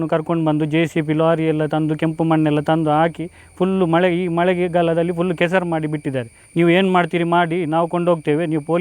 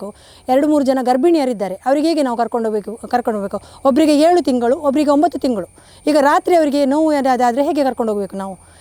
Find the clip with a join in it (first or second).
first